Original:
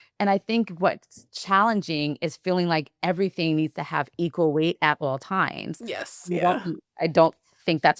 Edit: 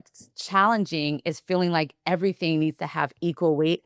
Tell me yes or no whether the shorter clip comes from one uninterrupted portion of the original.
yes